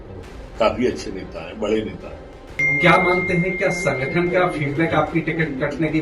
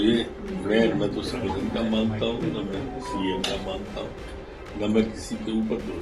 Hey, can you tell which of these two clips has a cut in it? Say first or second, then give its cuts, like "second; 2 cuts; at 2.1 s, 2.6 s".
first; 1 cut; at 2.6 s